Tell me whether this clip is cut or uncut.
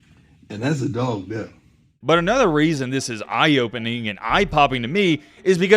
cut